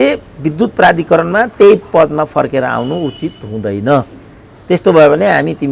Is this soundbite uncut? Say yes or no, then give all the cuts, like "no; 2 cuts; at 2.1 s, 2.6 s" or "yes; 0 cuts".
yes; 0 cuts